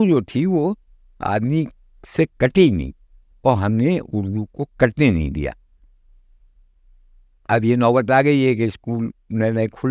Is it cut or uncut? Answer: uncut